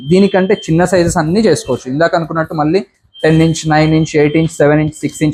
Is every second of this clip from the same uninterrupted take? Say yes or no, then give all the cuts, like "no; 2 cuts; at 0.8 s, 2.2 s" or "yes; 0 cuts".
yes; 0 cuts